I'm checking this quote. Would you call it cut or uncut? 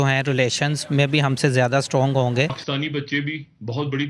cut